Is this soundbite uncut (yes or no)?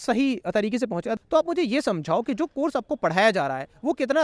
no